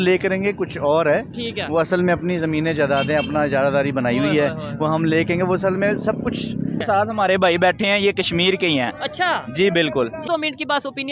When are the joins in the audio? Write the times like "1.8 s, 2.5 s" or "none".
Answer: 6.8 s, 10.2 s